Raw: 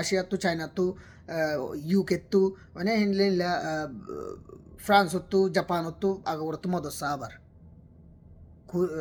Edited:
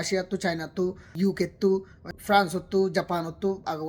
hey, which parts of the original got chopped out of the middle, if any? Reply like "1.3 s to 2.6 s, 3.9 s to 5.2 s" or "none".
1.1 s to 1.8 s, 2.7 s to 4.6 s